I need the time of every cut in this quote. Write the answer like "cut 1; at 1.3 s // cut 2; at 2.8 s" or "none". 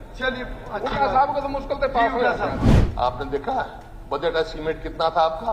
cut 1; at 2.8 s